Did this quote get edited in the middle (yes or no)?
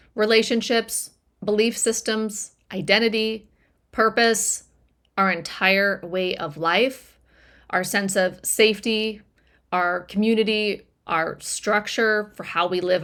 no